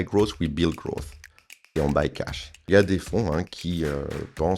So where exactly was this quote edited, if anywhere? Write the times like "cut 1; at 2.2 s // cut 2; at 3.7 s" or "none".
cut 1; at 2.6 s

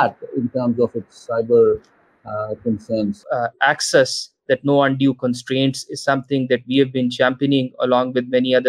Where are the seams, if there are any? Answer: cut 1; at 3.2 s

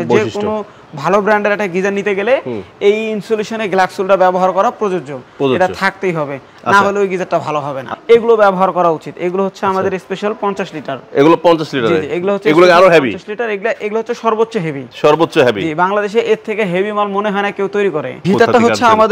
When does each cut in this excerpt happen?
cut 1; at 7.9 s // cut 2; at 18.2 s

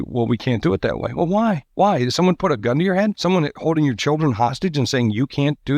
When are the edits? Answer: cut 1; at 1.7 s // cut 2; at 3.2 s

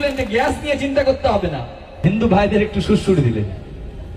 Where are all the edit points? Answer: cut 1; at 1.8 s

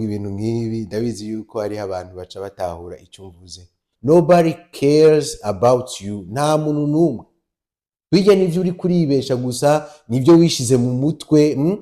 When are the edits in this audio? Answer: cut 1; at 3.9 s

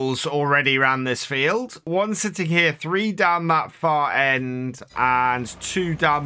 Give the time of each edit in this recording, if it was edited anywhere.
cut 1; at 1.9 s

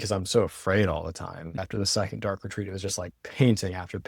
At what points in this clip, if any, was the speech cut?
cut 1; at 1.6 s

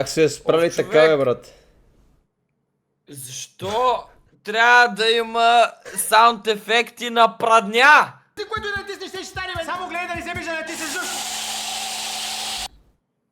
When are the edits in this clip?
cut 1; at 8.3 s

